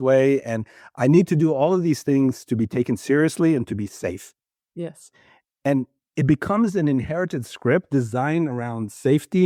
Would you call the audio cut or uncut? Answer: uncut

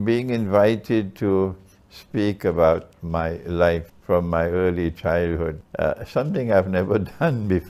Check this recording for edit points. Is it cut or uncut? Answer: cut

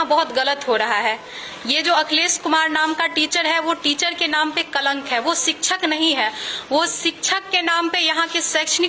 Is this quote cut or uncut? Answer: uncut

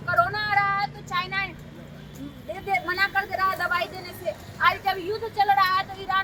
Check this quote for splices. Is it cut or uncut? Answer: uncut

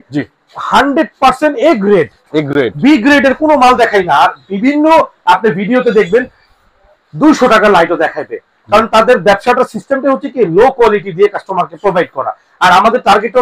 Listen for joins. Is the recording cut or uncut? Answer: uncut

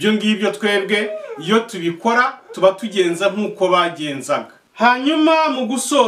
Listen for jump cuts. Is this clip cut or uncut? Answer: cut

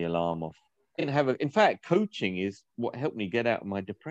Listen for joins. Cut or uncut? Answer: cut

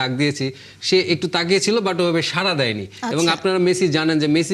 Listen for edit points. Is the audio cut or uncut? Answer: uncut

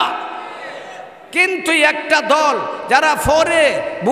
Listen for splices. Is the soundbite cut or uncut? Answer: cut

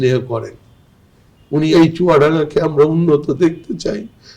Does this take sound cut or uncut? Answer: cut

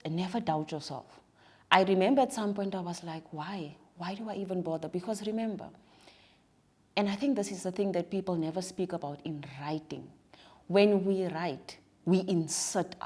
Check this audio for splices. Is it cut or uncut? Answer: uncut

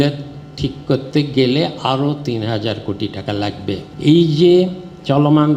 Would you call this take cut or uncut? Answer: cut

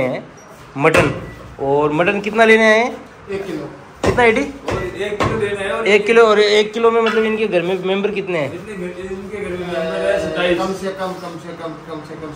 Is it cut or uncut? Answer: uncut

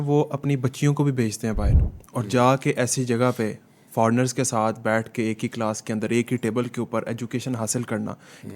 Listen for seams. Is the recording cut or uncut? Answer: uncut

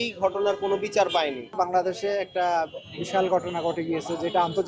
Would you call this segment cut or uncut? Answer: cut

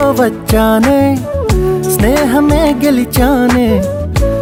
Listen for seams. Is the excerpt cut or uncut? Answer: uncut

